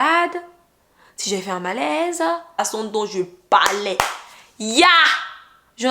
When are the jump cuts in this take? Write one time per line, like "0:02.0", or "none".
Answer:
0:02.6